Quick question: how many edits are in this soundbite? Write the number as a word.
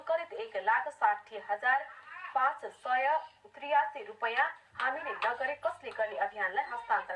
zero